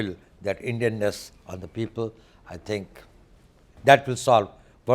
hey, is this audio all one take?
yes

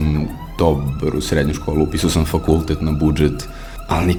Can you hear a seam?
no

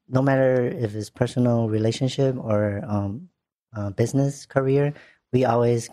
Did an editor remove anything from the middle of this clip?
no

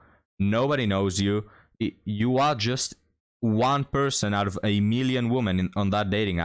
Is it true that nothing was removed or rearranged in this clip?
yes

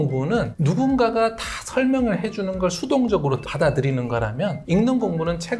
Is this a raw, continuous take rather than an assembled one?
yes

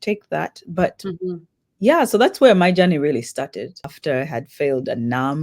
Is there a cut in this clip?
yes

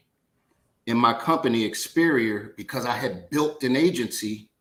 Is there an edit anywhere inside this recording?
no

